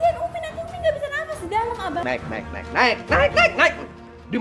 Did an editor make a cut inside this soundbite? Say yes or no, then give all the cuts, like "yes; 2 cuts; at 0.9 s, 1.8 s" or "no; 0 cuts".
yes; 1 cut; at 2.0 s